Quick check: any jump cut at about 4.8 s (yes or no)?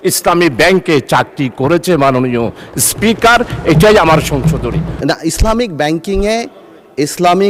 yes